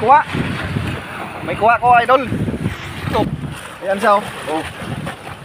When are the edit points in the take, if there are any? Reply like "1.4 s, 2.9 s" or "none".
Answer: 3.3 s